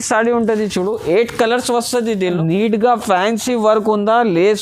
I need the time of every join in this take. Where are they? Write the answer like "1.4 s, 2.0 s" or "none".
2.4 s